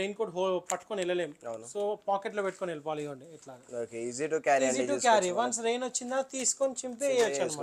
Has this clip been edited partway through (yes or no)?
no